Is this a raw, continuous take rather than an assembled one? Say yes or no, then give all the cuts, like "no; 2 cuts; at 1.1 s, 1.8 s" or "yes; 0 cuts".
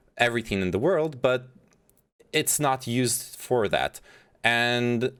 yes; 0 cuts